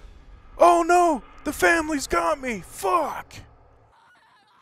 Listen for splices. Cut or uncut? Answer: uncut